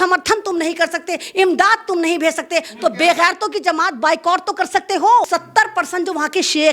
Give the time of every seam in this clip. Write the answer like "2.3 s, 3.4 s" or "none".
5.3 s